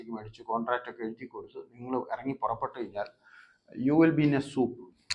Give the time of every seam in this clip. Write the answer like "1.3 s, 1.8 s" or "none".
none